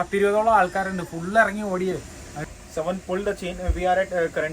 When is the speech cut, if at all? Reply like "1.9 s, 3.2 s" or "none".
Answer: 2.4 s